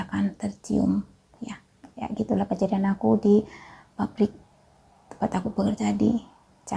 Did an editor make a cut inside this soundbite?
no; 0 cuts

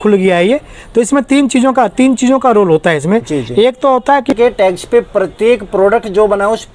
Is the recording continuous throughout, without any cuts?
no; 1 cut; at 4.3 s

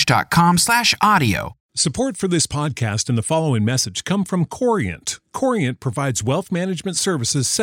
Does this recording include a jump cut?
yes; 1 cut; at 1.6 s

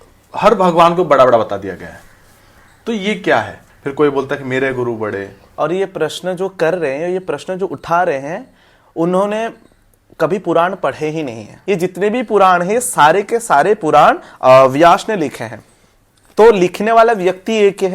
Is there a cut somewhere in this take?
yes; 3 cuts; at 3.6 s, 5.3 s, 11.5 s

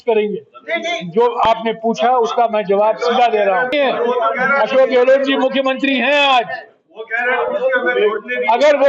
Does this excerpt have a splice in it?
yes; 1 cut; at 3.7 s

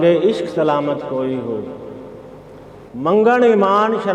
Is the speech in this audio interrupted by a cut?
yes; 1 cut; at 2.7 s

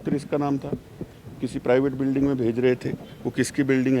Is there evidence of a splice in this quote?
no; 0 cuts

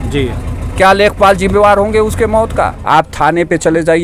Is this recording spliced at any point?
yes; 1 cut; at 2.8 s

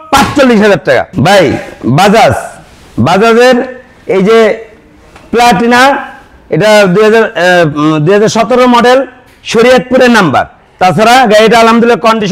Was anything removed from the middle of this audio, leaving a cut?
no; 0 cuts

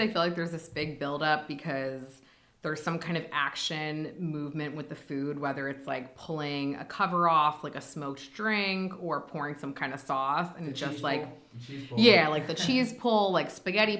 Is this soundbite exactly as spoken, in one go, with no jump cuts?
yes; 0 cuts

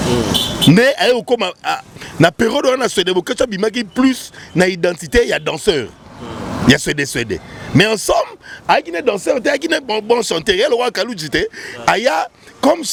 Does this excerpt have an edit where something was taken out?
no; 0 cuts

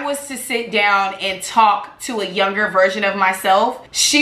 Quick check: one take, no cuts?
yes; 0 cuts

